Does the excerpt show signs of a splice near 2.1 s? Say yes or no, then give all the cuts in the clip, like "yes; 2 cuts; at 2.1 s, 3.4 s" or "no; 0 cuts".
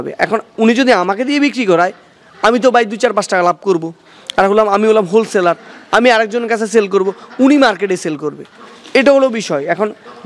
no; 0 cuts